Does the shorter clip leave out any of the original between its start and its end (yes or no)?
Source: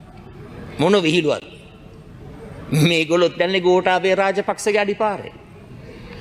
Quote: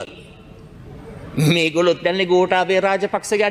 no